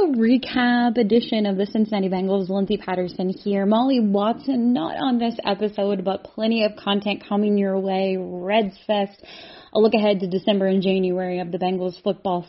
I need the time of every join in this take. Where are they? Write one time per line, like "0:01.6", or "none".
none